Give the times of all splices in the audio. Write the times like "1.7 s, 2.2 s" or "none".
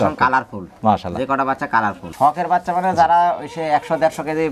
2.0 s